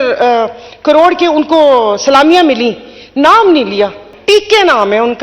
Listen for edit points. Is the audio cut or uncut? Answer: cut